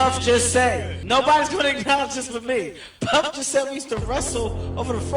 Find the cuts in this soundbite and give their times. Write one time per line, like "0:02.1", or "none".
0:00.9